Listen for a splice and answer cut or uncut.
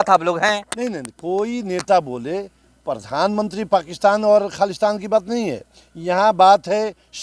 uncut